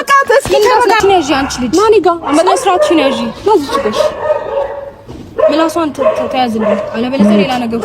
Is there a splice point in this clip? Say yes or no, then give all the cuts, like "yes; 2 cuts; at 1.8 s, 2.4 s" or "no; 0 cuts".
yes; 1 cut; at 0.9 s